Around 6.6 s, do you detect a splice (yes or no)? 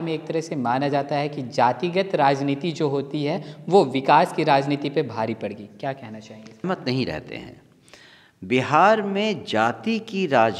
yes